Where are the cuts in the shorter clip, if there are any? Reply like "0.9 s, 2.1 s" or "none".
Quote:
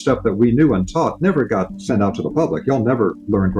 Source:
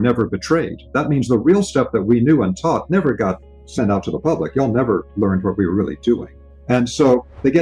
1.8 s